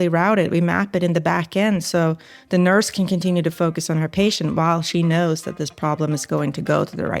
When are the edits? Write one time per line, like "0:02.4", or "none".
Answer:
none